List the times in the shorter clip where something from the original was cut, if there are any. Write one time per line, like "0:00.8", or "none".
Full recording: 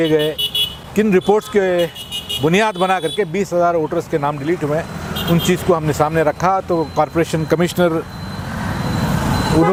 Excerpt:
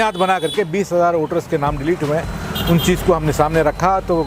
none